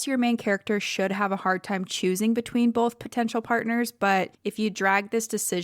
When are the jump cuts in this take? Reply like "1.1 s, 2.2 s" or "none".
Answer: 4.4 s